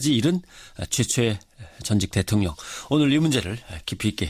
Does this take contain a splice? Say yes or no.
no